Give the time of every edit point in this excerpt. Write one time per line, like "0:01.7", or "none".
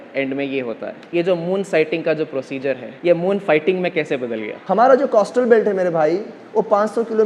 0:01.0
0:02.9
0:04.5